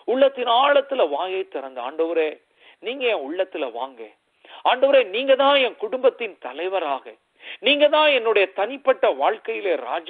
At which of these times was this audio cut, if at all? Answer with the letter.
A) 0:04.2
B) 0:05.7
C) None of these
C